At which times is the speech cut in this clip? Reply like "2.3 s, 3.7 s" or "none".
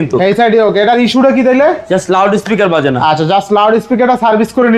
none